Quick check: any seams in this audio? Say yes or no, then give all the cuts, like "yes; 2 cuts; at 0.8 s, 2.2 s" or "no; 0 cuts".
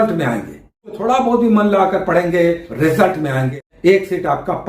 yes; 3 cuts; at 0.9 s, 2.7 s, 3.6 s